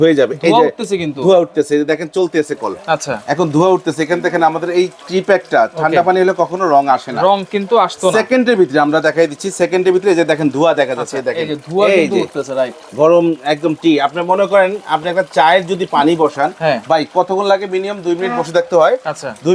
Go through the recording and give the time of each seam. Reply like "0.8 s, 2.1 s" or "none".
none